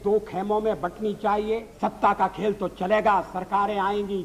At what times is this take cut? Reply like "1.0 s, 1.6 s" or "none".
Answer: 1.7 s